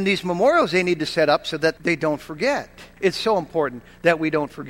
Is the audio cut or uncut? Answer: cut